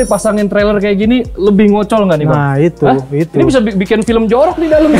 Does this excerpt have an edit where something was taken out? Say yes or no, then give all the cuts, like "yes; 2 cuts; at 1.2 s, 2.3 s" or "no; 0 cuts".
no; 0 cuts